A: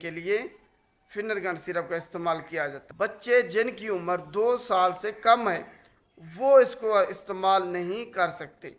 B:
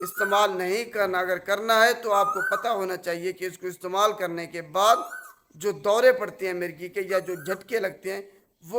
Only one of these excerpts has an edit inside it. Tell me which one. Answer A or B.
A